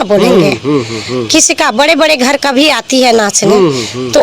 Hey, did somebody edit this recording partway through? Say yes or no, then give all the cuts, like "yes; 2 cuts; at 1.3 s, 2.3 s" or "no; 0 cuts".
no; 0 cuts